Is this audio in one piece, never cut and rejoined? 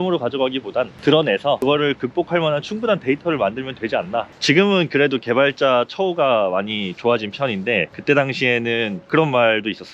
no; 1 cut; at 4.3 s

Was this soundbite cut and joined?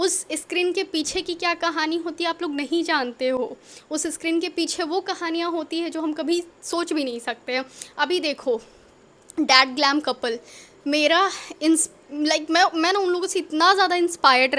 no; 0 cuts

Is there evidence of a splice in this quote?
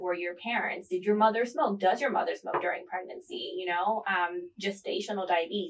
no; 0 cuts

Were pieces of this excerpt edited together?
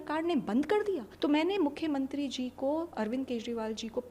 yes; 1 cut; at 1.1 s

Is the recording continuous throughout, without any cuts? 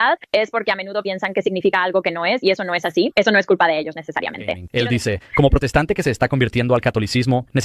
no; 1 cut; at 4.6 s

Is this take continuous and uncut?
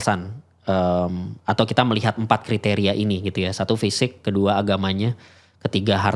yes; 0 cuts

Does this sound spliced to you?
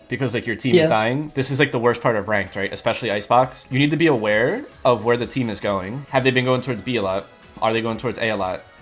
yes; 3 cuts; at 3.7 s, 6.0 s, 7.6 s

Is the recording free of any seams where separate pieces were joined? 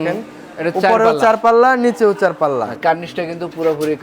no; 1 cut; at 2.7 s

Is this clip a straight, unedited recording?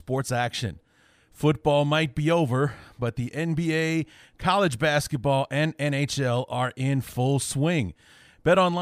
yes; 0 cuts

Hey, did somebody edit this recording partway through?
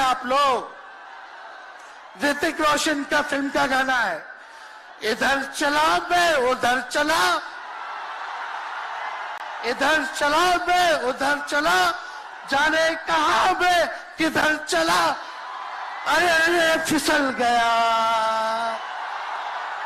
no; 0 cuts

